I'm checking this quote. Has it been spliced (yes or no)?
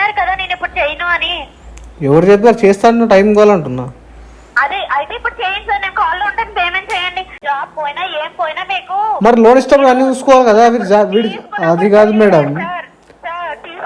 yes